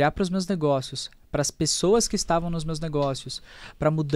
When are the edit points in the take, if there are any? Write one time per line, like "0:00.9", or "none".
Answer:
none